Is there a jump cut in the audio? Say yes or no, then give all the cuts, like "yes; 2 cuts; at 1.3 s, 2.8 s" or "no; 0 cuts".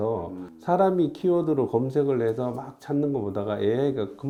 no; 0 cuts